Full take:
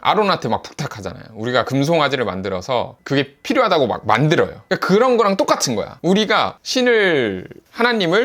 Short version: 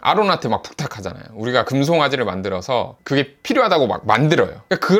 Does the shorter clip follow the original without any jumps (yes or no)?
yes